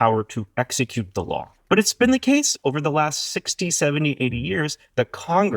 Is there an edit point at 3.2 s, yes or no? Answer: no